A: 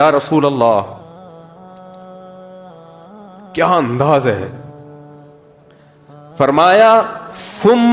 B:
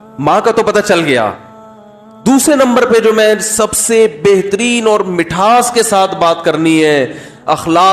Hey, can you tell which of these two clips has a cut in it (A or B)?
A